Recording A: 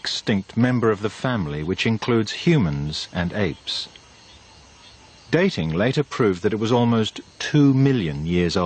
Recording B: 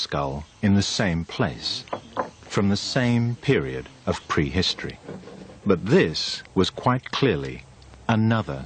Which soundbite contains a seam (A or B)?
A